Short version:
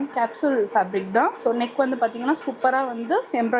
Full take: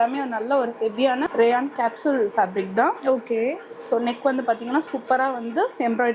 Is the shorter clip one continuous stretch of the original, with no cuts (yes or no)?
no